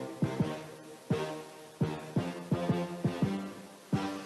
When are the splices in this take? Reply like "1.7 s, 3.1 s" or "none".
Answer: none